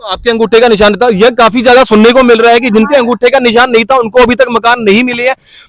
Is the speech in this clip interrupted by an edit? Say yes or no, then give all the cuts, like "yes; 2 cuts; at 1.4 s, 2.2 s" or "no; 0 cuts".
no; 0 cuts